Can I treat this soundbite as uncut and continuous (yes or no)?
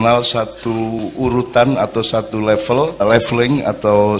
no